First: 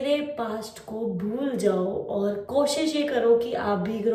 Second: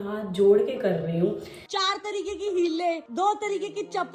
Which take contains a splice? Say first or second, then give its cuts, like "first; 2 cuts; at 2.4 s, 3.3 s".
second; 1 cut; at 1.7 s